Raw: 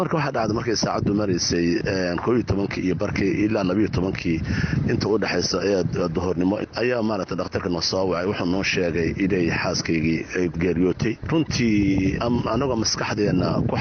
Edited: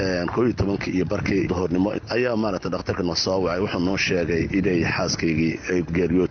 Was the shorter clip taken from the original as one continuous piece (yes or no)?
no